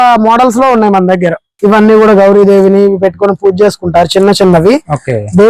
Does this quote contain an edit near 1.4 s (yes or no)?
yes